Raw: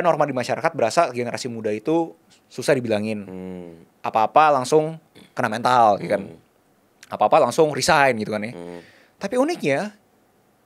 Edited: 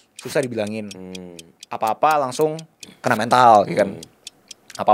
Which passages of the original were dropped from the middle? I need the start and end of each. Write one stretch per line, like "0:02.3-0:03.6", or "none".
none